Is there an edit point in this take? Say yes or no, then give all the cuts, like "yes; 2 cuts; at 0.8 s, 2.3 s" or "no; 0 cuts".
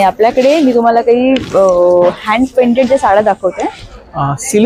no; 0 cuts